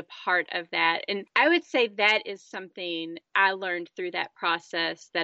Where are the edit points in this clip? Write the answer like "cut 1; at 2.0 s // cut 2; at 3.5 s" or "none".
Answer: cut 1; at 1.3 s